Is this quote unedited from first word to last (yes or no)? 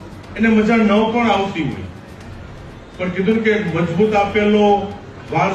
yes